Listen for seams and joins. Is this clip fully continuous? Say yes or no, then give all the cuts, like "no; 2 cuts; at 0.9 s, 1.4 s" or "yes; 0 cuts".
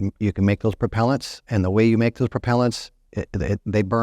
no; 1 cut; at 1.5 s